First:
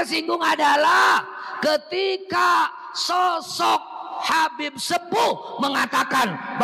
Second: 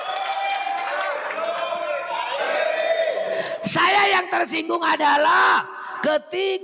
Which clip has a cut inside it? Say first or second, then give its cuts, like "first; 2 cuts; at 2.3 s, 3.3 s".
second; 1 cut; at 2.4 s